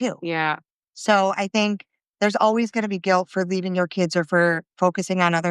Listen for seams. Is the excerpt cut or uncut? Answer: uncut